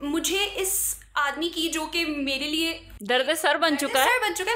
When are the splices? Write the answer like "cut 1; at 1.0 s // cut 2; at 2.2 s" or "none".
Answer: none